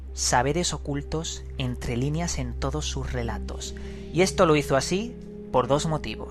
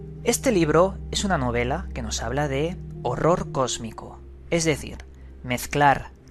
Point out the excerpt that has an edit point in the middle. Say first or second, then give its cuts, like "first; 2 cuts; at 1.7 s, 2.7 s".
first; 1 cut; at 5.1 s